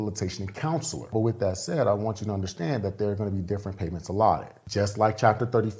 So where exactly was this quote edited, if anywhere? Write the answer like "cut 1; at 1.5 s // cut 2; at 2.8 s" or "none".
cut 1; at 1.1 s // cut 2; at 4.6 s